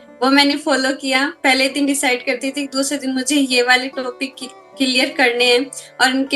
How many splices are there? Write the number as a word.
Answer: one